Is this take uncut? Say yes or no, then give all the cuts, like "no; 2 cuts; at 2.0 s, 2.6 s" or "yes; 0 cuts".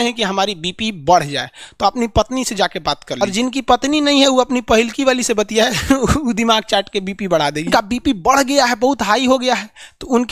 no; 2 cuts; at 3.2 s, 7.7 s